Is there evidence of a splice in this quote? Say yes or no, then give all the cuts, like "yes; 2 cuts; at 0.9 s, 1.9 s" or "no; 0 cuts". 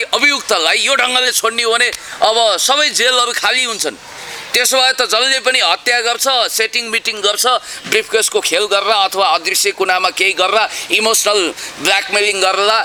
no; 0 cuts